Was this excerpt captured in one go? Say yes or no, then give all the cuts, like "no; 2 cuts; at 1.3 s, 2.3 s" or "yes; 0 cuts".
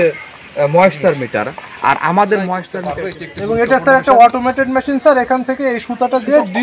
no; 1 cut; at 2.8 s